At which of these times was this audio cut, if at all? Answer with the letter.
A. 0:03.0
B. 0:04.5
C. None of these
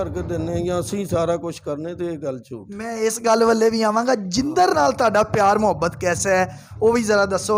C